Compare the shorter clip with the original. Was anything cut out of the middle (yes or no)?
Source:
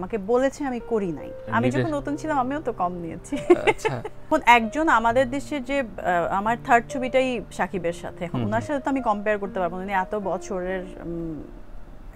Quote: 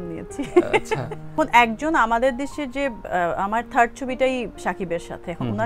no